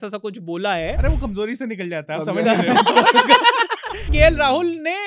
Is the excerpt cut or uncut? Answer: cut